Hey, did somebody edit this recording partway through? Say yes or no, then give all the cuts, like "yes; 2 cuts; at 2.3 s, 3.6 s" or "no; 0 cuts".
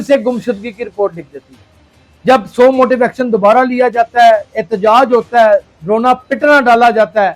no; 0 cuts